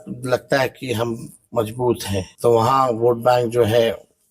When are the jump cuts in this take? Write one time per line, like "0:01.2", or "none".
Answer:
0:02.3